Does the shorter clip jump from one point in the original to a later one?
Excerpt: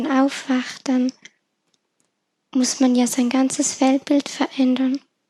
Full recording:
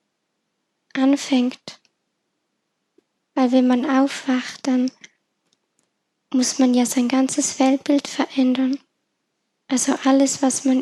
no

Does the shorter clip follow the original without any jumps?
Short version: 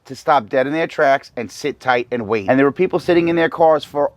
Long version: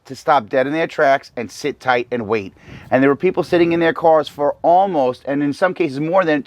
no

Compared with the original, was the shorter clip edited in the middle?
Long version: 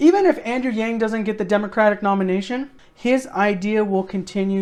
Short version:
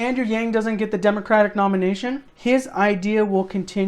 yes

